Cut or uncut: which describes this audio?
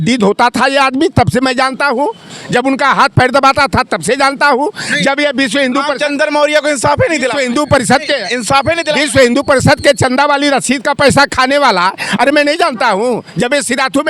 uncut